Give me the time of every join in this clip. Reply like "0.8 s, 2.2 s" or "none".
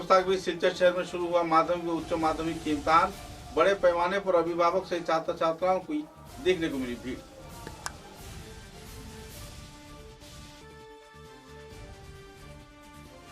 none